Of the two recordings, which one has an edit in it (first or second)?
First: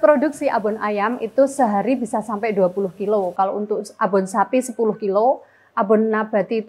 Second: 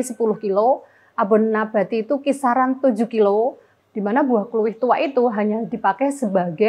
second